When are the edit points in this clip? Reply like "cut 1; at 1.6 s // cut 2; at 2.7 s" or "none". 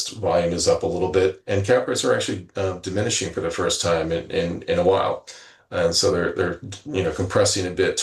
none

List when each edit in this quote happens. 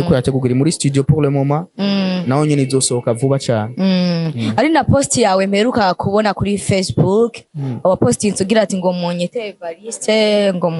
none

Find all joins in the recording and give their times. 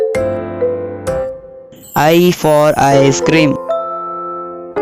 cut 1; at 1.6 s // cut 2; at 3.6 s

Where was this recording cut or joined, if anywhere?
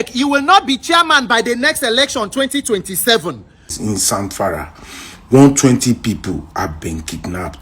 cut 1; at 3.8 s

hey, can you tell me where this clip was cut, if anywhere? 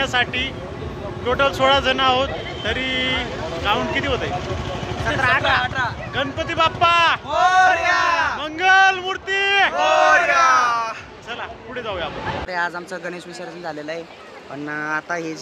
cut 1; at 12.5 s

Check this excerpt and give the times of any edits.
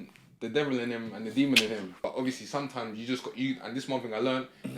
cut 1; at 2.0 s

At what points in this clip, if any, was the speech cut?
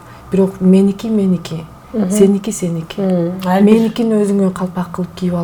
none

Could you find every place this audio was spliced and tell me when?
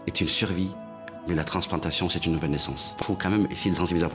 cut 1; at 3.0 s

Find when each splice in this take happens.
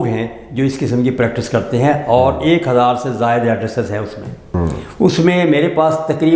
cut 1; at 4.5 s

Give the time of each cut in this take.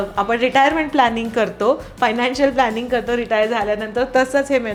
none

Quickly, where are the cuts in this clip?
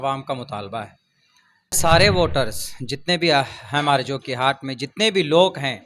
cut 1; at 1.8 s

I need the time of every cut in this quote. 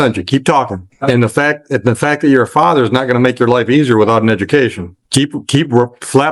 cut 1; at 0.9 s // cut 2; at 5.0 s

